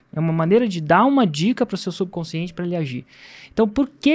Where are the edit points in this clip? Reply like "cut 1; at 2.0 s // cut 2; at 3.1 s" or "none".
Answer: none